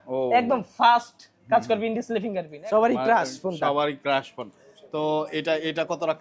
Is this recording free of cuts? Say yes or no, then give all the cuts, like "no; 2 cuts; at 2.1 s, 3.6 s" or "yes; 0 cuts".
no; 1 cut; at 2.5 s